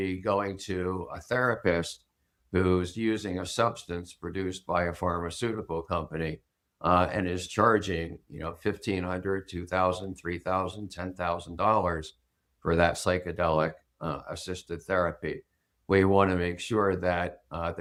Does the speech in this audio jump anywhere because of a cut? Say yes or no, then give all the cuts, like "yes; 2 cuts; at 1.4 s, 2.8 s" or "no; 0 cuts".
no; 0 cuts